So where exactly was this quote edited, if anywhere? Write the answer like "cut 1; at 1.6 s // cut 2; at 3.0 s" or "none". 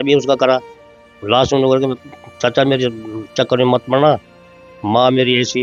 none